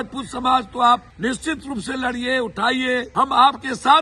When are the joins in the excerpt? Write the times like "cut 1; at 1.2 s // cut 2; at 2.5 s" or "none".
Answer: cut 1; at 1.1 s // cut 2; at 3.1 s